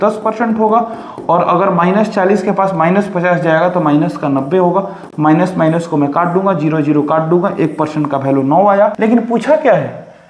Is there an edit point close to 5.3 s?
no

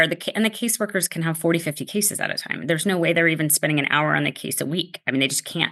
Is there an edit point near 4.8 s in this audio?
no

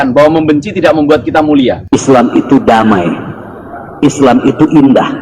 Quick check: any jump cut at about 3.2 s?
no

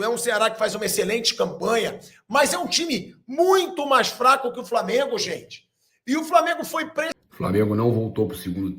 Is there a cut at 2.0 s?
no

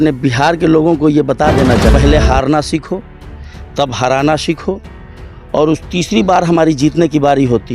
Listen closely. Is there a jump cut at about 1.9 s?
yes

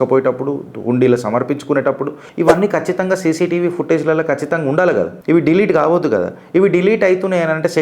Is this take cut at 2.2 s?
yes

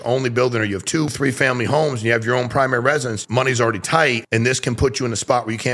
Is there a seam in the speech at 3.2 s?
yes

